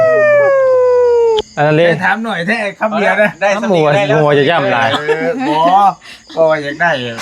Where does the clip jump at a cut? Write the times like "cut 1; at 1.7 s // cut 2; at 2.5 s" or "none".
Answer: cut 1; at 1.4 s

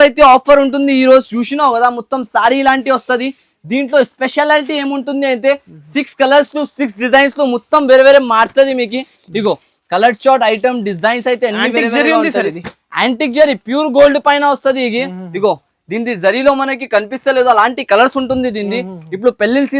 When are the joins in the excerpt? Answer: none

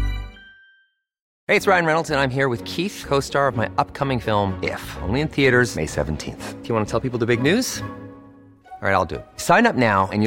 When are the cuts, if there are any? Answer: cut 1; at 1.3 s

